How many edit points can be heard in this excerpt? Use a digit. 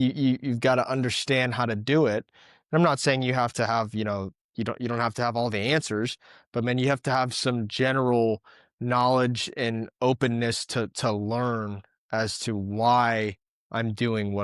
0